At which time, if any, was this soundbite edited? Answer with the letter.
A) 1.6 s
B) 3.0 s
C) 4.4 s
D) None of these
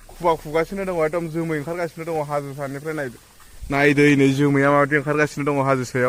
D